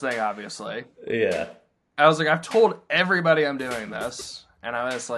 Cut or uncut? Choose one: uncut